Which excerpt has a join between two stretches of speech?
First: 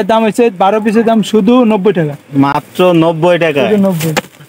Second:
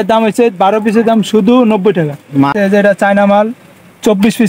second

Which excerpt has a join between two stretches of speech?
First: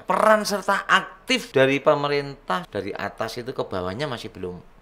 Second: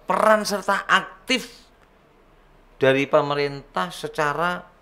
first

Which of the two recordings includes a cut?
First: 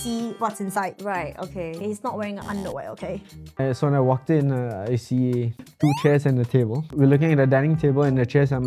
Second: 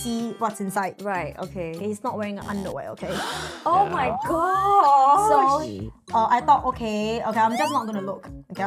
first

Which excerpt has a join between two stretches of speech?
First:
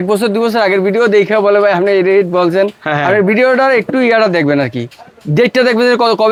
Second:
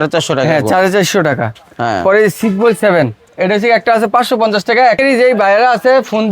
second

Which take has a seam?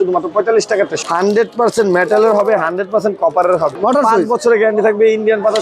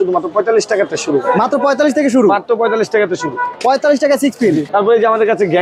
first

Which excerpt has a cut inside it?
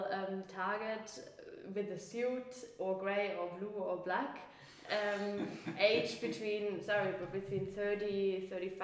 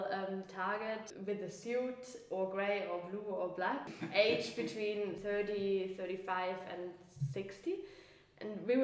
second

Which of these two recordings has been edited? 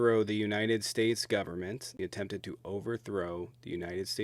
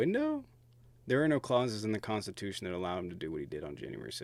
first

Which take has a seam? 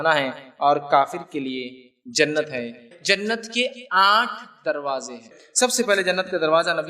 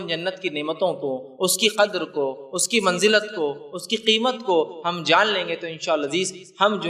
first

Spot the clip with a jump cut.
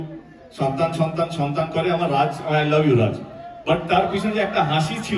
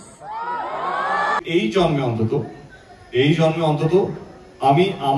second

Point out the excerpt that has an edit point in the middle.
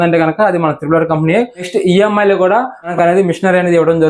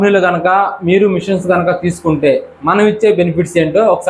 first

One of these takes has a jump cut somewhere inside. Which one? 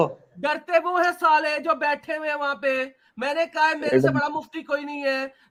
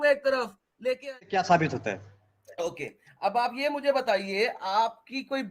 second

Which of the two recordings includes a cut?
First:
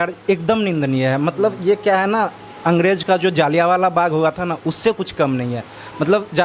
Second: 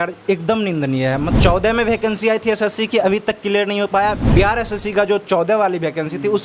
second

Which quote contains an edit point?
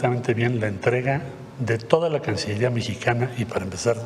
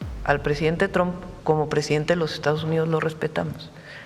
second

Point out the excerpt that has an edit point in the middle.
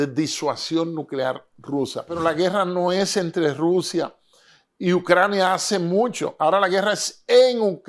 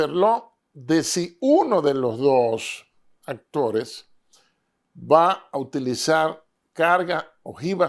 first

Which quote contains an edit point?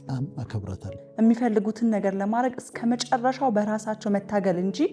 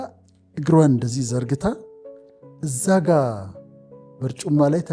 first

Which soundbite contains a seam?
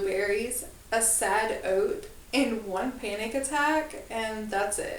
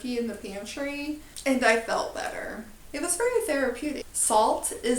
second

